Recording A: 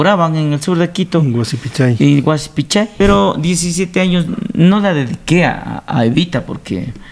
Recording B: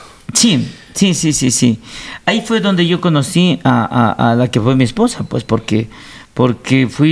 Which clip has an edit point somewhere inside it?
A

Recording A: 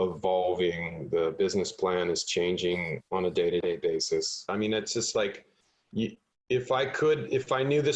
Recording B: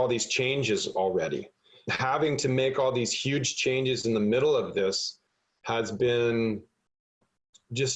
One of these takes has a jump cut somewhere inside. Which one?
A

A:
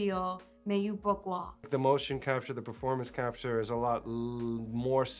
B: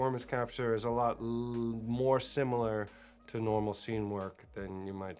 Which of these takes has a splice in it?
A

